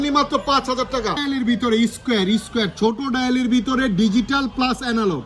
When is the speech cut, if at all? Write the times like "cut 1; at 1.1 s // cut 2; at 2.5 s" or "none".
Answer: cut 1; at 1.2 s